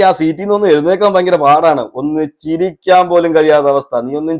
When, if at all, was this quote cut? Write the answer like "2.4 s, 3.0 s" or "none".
none

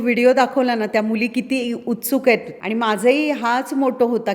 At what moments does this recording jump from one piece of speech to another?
2.5 s

